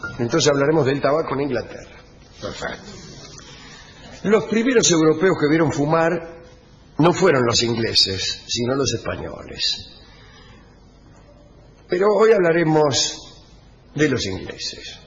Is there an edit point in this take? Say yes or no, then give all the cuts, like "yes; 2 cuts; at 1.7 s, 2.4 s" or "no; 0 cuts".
no; 0 cuts